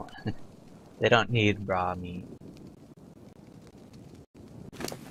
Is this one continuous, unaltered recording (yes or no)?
yes